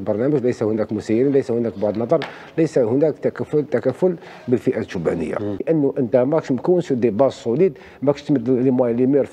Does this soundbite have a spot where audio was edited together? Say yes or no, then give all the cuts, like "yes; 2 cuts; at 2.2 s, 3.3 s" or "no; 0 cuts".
yes; 1 cut; at 5.6 s